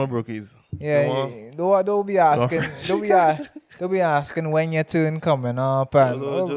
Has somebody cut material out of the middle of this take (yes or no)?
no